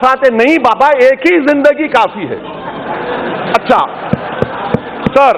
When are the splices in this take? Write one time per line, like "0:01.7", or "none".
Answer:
none